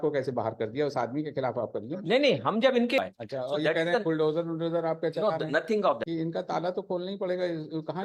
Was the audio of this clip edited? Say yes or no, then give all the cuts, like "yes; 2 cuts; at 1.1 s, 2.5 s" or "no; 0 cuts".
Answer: yes; 2 cuts; at 3.0 s, 6.0 s